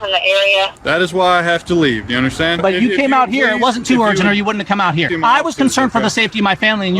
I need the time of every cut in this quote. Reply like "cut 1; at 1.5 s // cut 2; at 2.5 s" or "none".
cut 1; at 2.6 s // cut 2; at 5.1 s